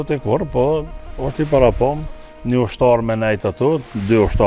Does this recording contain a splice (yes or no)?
no